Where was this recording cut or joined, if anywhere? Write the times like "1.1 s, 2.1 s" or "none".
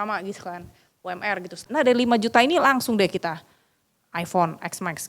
1.8 s